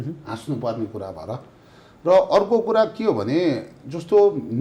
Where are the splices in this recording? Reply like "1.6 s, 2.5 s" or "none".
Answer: none